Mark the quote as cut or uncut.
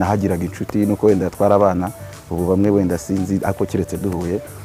uncut